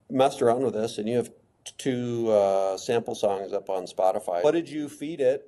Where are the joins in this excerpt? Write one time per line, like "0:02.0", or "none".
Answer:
0:04.4